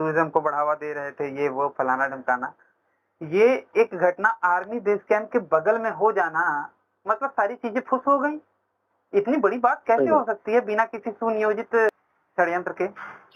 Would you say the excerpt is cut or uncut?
cut